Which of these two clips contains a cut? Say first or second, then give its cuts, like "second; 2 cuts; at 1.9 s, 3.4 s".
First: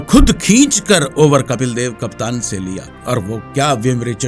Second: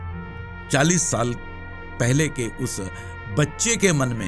first; 1 cut; at 2.9 s